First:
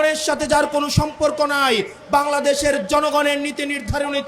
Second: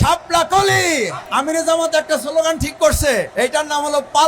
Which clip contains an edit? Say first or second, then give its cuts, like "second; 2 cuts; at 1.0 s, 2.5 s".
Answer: second; 2 cuts; at 1.2 s, 3.3 s